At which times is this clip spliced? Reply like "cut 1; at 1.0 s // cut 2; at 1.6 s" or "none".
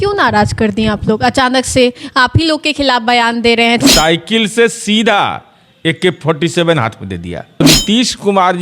cut 1; at 3.8 s // cut 2; at 7.6 s